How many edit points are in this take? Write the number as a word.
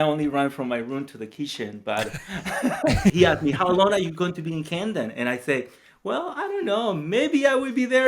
one